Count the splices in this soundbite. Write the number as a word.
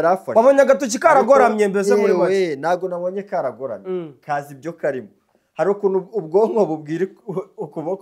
zero